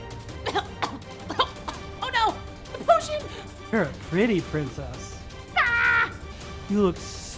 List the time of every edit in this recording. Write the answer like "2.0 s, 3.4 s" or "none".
3.5 s, 6.3 s